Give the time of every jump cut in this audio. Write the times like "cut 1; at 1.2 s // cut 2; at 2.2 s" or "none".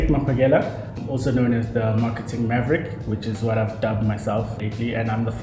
cut 1; at 1.0 s // cut 2; at 4.6 s